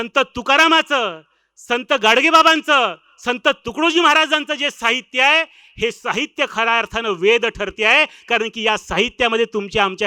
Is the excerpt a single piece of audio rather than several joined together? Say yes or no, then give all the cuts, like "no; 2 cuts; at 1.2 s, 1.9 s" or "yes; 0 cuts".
yes; 0 cuts